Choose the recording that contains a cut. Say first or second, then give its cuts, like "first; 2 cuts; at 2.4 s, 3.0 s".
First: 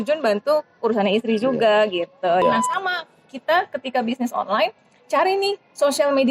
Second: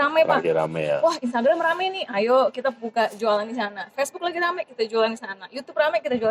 first; 1 cut; at 2.4 s